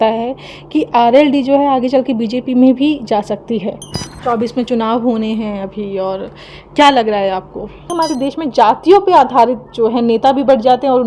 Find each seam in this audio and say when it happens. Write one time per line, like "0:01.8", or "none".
0:03.9
0:07.9